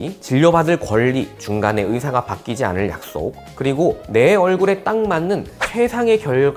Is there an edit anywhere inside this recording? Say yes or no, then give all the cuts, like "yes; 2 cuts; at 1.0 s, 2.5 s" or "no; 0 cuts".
no; 0 cuts